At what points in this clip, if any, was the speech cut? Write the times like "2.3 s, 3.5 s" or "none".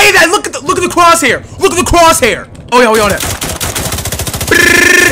2.7 s